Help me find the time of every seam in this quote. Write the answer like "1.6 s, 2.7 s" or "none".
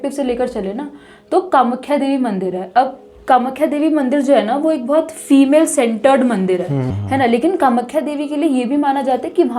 6.9 s